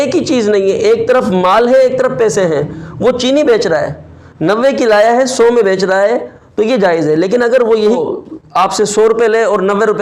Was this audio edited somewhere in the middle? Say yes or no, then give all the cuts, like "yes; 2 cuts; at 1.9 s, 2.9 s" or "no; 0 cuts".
yes; 1 cut; at 8.0 s